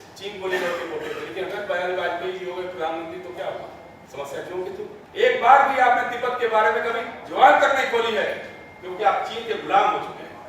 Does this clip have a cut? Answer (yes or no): yes